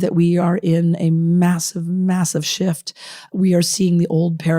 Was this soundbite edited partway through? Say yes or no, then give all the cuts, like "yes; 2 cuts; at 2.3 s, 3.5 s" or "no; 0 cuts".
yes; 1 cut; at 3.3 s